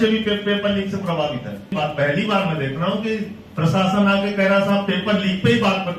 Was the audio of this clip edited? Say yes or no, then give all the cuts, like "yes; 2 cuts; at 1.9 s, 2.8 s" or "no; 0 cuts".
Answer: yes; 1 cut; at 1.7 s